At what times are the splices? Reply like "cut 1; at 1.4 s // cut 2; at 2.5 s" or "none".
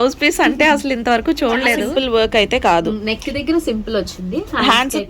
cut 1; at 1.8 s